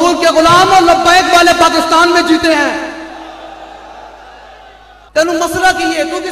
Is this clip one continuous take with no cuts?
no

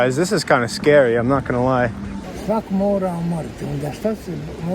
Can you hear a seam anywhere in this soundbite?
yes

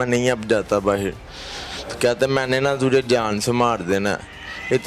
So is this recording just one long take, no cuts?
yes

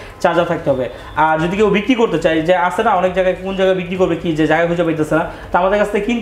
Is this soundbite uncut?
yes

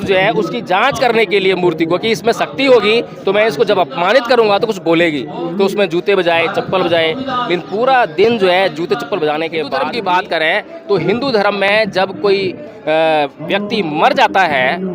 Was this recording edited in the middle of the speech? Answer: yes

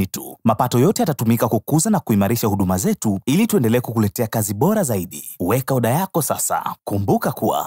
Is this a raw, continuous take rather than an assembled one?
no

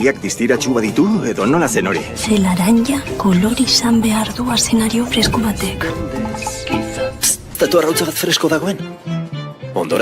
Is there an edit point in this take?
yes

